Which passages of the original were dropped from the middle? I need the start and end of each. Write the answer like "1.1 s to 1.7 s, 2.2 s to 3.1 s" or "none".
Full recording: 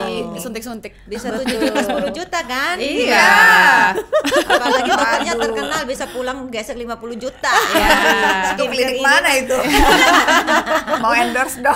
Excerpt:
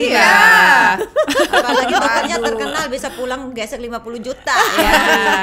none